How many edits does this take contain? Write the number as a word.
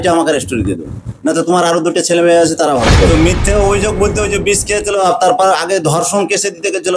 one